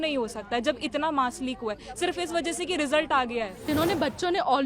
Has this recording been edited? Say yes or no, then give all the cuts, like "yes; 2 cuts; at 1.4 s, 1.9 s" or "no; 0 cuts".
yes; 1 cut; at 3.7 s